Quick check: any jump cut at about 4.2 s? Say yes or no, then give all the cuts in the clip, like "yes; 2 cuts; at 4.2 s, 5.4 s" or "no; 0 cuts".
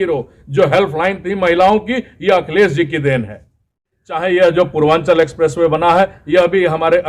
yes; 1 cut; at 4.2 s